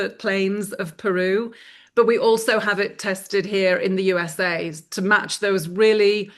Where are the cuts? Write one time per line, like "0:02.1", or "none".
none